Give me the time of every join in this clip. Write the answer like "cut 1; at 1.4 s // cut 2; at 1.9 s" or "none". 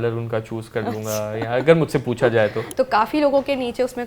cut 1; at 2.6 s